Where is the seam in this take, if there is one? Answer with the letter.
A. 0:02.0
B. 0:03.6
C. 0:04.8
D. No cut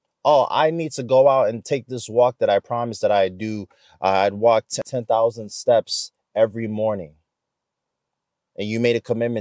C